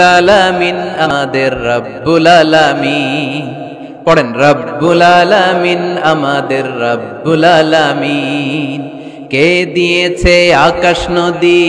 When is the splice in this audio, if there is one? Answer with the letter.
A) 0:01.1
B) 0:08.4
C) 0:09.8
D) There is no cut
A